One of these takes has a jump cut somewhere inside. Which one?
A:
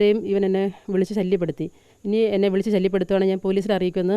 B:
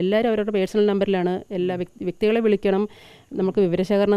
A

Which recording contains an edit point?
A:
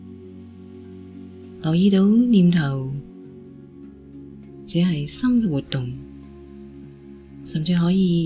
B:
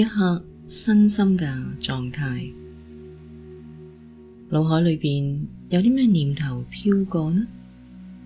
B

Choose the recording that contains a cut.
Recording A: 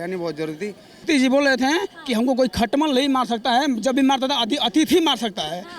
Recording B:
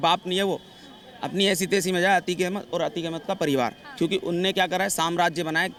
A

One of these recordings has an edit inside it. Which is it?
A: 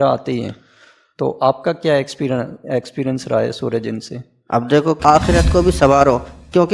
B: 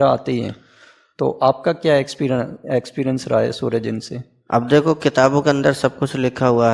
A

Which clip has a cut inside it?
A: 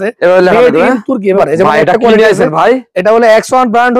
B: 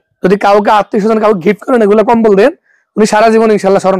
A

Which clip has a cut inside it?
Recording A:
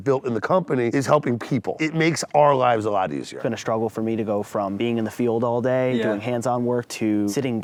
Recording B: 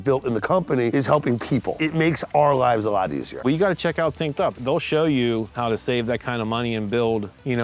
B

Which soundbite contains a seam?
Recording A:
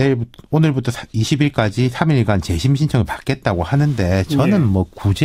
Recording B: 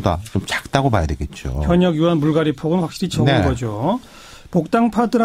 B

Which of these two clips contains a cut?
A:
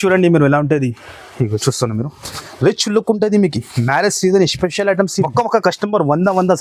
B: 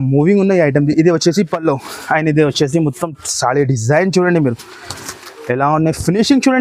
A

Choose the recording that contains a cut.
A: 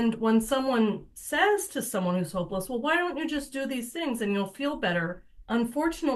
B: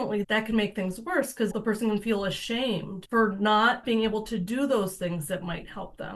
B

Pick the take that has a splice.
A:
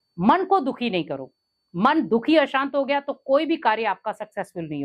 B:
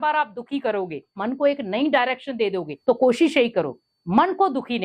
B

